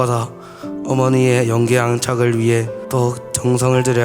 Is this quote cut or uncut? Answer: cut